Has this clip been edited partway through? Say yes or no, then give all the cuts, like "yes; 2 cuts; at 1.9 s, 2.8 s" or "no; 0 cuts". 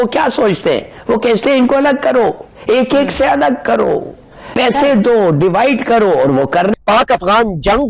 no; 0 cuts